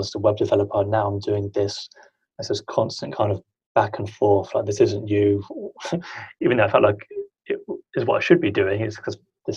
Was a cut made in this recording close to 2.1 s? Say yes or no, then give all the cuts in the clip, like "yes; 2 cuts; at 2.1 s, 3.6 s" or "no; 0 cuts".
no; 0 cuts